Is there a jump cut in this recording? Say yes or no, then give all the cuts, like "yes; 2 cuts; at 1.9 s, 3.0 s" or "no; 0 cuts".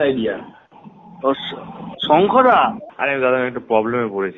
yes; 1 cut; at 2.9 s